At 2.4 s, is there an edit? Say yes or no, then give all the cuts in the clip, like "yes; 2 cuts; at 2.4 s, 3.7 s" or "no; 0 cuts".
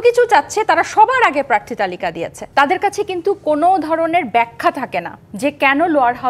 yes; 1 cut; at 2.4 s